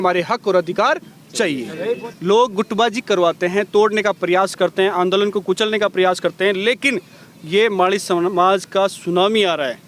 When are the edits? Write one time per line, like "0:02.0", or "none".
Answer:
0:02.1